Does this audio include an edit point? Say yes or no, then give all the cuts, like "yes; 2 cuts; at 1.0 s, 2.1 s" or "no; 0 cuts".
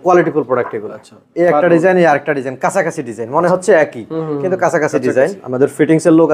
yes; 2 cuts; at 1.3 s, 5.4 s